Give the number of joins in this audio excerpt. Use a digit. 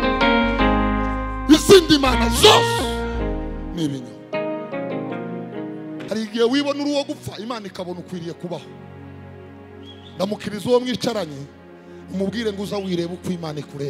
1